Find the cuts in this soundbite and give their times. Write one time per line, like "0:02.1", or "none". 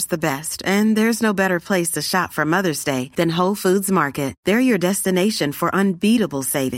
none